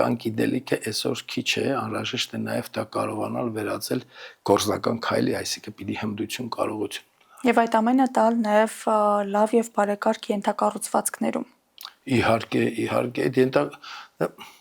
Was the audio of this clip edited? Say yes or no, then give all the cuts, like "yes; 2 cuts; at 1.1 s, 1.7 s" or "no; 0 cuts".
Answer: no; 0 cuts